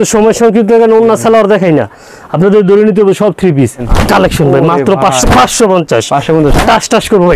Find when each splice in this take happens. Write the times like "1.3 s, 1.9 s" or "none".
3.8 s